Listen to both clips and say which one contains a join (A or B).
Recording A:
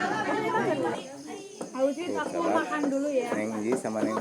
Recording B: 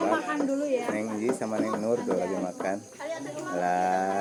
A